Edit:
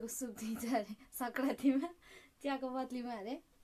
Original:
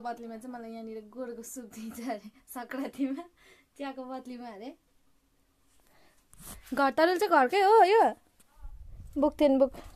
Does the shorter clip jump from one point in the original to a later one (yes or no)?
no